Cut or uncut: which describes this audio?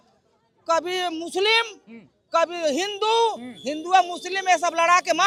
uncut